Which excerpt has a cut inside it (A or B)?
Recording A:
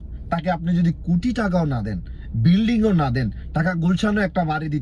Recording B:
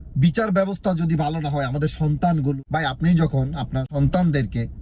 B